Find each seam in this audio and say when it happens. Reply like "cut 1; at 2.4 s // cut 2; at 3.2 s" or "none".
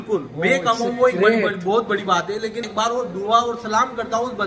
cut 1; at 2.6 s

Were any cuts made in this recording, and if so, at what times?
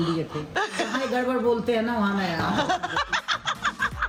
none

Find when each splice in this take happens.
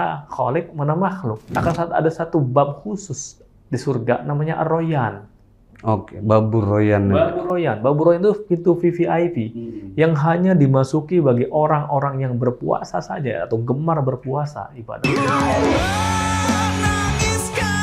cut 1; at 1.4 s // cut 2; at 14.8 s

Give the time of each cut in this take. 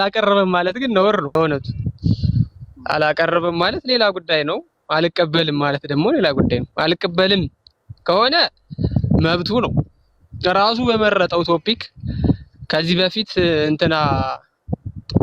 cut 1; at 1.3 s

